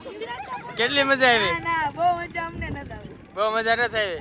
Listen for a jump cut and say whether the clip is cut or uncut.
uncut